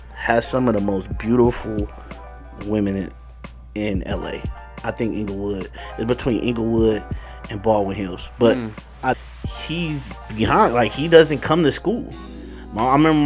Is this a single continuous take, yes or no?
no